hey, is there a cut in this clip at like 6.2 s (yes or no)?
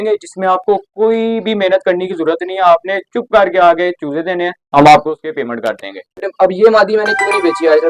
yes